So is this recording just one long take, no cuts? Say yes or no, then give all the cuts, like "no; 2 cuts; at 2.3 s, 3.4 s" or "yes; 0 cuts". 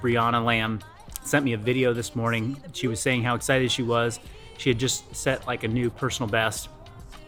yes; 0 cuts